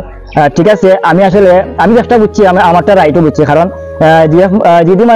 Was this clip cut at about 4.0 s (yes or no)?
no